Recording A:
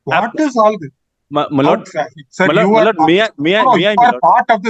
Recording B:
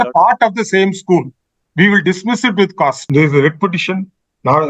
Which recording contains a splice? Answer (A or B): B